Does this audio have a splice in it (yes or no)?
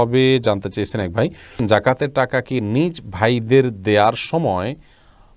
yes